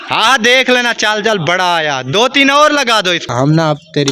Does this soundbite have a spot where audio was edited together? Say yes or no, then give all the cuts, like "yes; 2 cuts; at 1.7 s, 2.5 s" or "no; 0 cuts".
yes; 1 cut; at 3.2 s